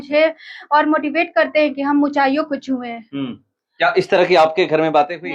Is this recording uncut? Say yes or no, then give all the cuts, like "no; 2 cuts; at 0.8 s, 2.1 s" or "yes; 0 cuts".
yes; 0 cuts